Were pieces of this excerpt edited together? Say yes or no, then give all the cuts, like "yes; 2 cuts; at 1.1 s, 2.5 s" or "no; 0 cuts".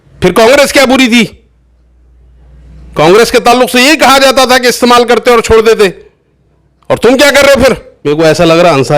yes; 1 cut; at 7.9 s